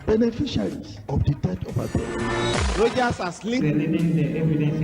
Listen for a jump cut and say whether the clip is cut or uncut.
cut